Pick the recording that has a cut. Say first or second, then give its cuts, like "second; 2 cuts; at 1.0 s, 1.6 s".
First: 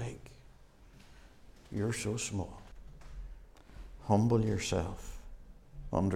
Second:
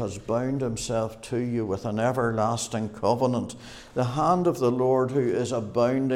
first; 1 cut; at 2.7 s